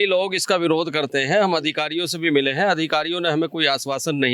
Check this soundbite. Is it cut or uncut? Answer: uncut